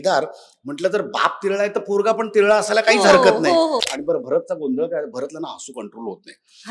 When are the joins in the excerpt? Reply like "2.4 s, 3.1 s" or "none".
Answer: 3.9 s